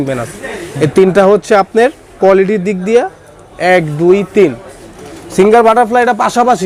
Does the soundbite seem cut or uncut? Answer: uncut